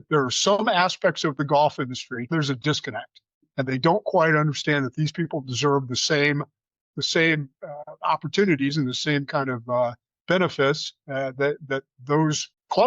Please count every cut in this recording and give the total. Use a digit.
1